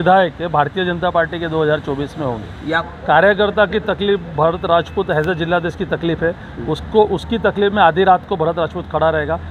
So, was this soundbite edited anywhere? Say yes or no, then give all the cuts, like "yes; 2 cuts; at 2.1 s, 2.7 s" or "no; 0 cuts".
yes; 1 cut; at 2.8 s